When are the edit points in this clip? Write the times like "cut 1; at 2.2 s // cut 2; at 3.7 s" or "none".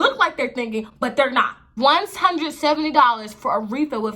cut 1; at 1.6 s